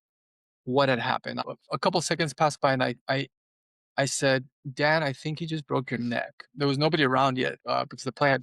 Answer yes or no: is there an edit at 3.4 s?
no